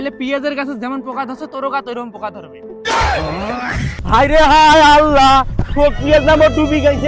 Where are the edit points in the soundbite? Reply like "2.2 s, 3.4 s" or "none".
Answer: 4.0 s